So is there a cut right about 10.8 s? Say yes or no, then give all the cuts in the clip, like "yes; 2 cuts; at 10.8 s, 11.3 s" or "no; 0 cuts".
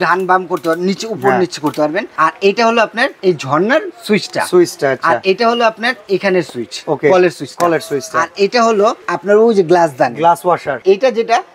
yes; 4 cuts; at 2.1 s, 3.1 s, 9.1 s, 10.8 s